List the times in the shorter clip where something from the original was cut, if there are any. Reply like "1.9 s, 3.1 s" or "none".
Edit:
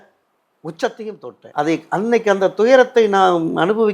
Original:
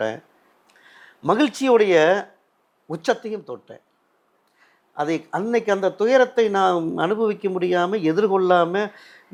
1.4 s